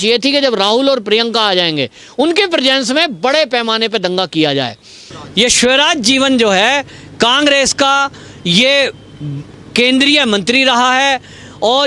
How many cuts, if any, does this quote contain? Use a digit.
1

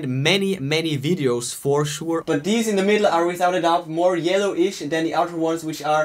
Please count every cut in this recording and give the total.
1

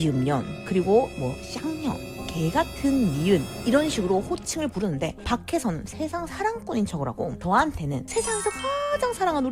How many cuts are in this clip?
1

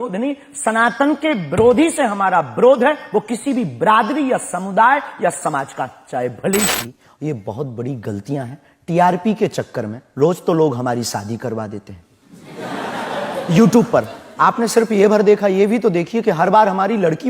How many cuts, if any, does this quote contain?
1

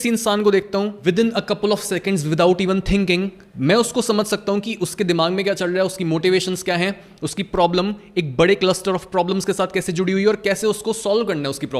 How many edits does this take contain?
2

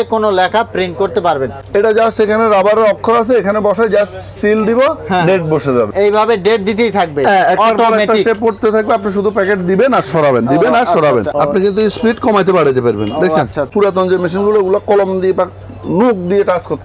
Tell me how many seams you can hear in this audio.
4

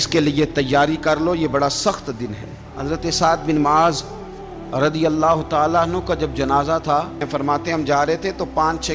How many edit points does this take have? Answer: 2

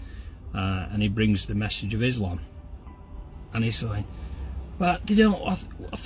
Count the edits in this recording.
0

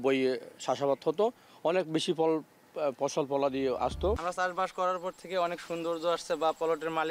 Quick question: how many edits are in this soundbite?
1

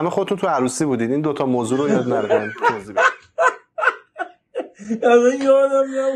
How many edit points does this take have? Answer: 0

